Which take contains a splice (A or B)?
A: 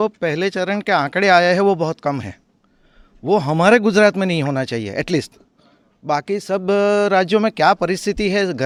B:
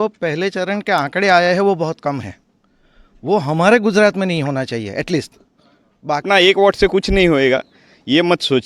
B